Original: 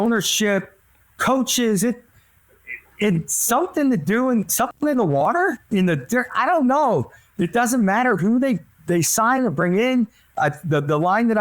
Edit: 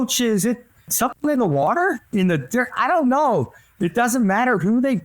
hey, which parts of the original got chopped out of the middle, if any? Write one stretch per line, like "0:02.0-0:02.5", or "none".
0:02.3-0:04.5